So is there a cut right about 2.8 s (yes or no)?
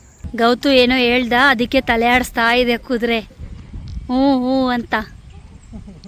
no